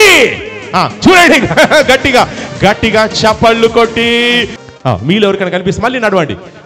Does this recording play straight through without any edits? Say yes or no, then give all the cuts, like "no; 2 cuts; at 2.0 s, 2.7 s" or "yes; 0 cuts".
no; 1 cut; at 4.6 s